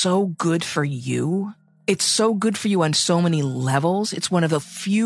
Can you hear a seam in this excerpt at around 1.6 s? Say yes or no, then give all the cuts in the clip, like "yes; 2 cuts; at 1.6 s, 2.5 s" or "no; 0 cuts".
yes; 1 cut; at 1.6 s